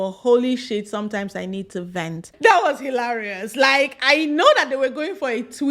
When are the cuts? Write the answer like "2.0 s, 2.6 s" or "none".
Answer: 2.2 s